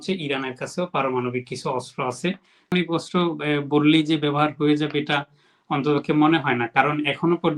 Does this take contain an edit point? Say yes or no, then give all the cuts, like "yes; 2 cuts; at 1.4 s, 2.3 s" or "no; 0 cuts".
yes; 1 cut; at 2.7 s